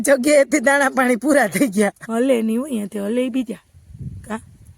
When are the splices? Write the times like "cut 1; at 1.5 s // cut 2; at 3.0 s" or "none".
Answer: cut 1; at 2.0 s